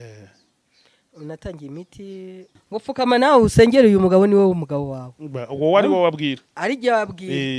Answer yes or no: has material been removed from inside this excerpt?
yes